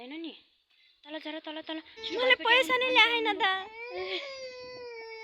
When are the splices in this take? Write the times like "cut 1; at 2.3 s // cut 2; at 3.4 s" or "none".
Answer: cut 1; at 2.0 s